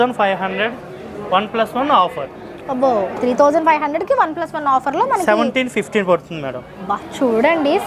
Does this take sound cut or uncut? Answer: uncut